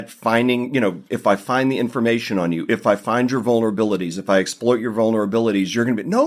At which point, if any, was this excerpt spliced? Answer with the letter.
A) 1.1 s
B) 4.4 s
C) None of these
A